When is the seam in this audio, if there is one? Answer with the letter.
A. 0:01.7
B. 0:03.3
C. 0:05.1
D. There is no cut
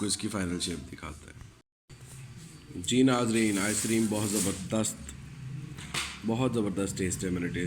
A